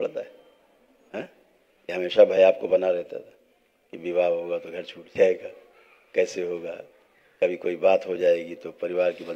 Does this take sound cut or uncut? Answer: uncut